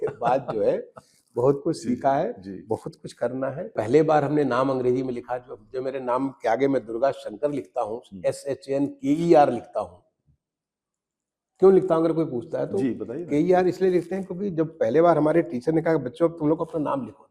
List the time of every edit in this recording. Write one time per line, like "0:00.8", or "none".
0:03.7